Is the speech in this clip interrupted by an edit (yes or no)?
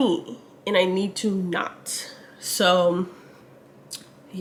no